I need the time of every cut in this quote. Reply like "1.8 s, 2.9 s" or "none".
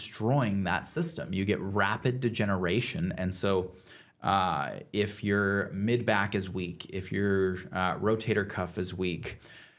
none